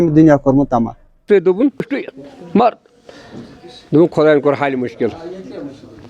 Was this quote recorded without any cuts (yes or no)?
no